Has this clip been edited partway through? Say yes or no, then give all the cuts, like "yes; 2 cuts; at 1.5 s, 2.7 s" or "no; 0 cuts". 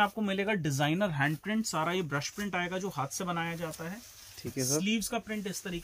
no; 0 cuts